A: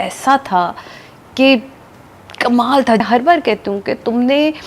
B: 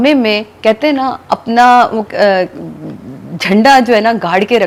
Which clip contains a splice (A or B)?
A